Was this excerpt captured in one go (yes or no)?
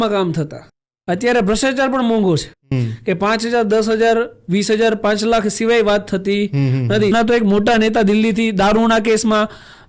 no